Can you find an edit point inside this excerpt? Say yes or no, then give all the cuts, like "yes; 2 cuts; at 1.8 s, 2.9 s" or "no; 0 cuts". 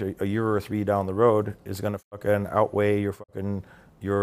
no; 0 cuts